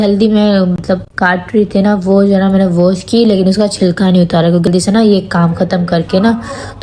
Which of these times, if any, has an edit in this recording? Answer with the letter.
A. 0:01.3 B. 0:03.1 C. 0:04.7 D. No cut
C